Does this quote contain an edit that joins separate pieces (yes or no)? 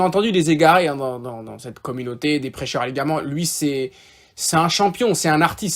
no